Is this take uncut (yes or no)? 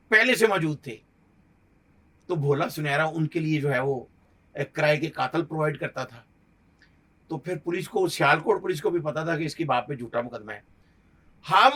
yes